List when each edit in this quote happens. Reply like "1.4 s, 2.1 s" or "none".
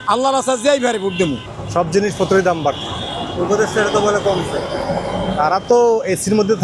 1.4 s